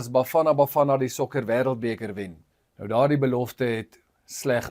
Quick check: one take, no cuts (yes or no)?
no